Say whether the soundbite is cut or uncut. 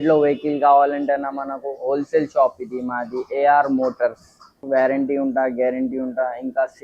cut